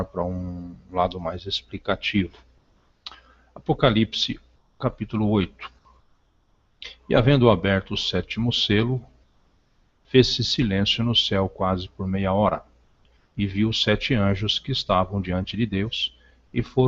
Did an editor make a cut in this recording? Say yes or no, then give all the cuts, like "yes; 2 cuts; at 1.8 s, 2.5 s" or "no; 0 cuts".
yes; 1 cut; at 3.8 s